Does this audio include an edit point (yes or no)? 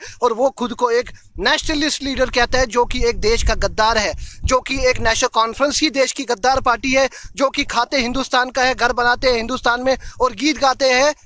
no